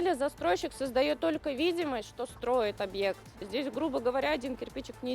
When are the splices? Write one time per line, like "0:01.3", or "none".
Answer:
0:03.4